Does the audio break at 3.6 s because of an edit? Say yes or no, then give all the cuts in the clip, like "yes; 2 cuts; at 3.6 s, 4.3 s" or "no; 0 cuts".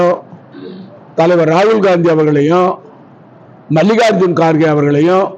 no; 0 cuts